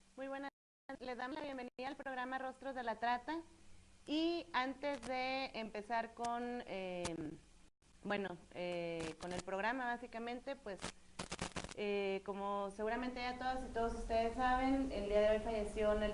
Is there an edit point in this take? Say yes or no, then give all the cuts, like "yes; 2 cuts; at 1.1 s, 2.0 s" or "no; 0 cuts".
no; 0 cuts